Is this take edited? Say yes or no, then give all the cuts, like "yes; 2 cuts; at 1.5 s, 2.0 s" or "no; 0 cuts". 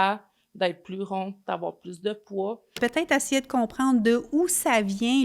yes; 1 cut; at 2.8 s